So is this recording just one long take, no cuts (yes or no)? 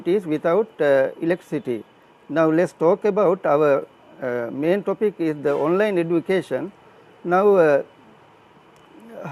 yes